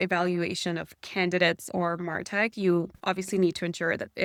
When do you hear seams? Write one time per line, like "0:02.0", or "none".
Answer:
none